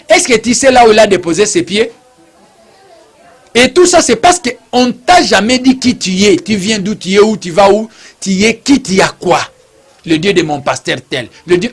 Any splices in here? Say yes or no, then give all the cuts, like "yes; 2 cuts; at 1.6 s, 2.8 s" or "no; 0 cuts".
yes; 2 cuts; at 3.1 s, 10.0 s